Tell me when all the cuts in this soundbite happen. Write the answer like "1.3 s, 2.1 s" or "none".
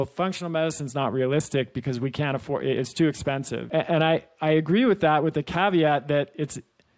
3.6 s